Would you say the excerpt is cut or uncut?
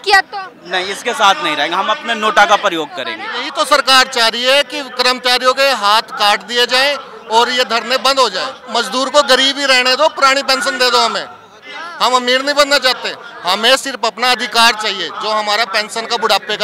cut